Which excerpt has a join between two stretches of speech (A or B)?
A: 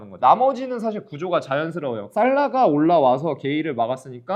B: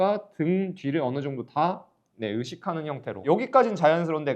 B